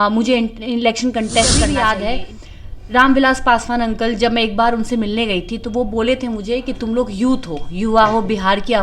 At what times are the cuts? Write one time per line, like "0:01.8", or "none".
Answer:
0:01.5

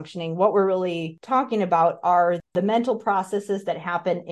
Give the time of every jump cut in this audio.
0:01.1
0:02.5

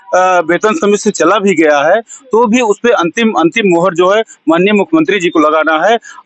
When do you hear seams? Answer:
none

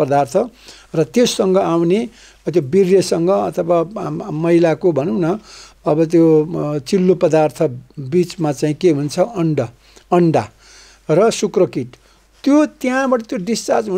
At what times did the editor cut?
none

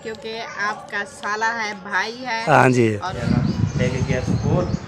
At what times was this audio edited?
0:03.1

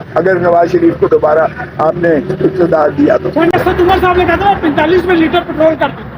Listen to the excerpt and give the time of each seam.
0:03.5

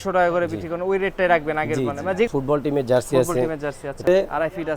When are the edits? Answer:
0:02.3
0:04.1

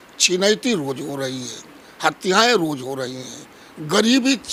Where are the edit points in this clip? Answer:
none

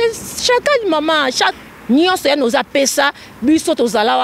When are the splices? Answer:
0:01.5

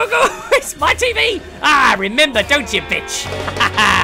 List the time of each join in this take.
none

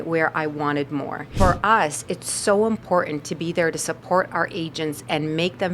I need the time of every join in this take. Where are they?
0:01.3

